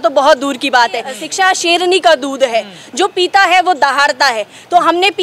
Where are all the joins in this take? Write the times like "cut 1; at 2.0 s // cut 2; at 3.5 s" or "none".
cut 1; at 1.2 s